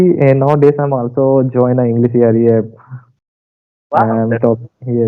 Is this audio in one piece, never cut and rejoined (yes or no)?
yes